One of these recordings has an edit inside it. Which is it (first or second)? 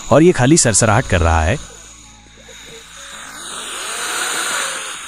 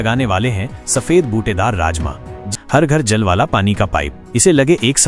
second